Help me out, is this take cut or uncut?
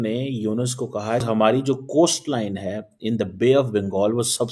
cut